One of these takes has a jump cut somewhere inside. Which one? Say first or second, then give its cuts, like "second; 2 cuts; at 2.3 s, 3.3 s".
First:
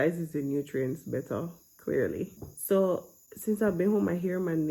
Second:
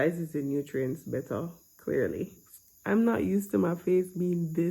second; 1 cut; at 2.5 s